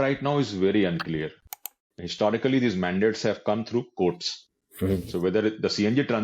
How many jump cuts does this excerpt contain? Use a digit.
1